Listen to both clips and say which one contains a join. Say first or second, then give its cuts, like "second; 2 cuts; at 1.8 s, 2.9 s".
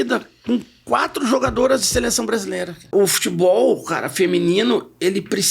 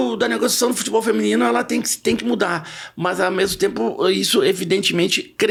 first; 1 cut; at 2.9 s